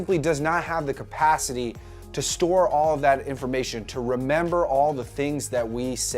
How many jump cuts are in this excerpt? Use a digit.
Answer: 1